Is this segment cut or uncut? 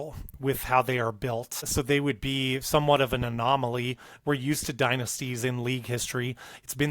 cut